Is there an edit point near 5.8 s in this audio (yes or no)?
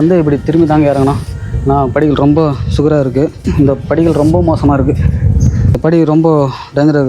yes